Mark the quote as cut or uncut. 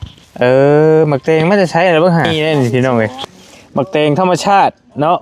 cut